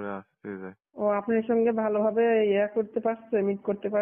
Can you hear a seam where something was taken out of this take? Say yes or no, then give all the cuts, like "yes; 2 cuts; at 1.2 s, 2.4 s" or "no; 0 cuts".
yes; 1 cut; at 1.0 s